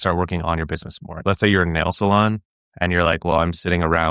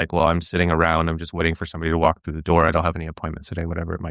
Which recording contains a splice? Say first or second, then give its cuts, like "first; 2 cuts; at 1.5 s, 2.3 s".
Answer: first; 1 cut; at 1.2 s